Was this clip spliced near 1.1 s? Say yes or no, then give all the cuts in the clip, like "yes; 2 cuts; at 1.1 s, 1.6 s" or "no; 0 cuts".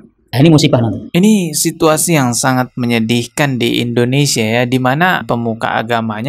yes; 1 cut; at 1.1 s